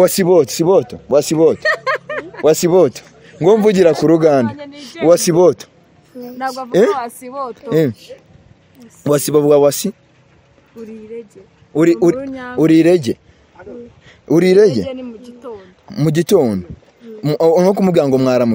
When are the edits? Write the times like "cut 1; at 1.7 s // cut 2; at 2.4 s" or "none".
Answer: none